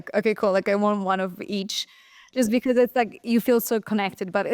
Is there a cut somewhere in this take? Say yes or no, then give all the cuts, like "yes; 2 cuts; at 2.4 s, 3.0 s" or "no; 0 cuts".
no; 0 cuts